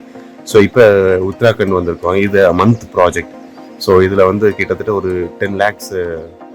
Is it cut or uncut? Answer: uncut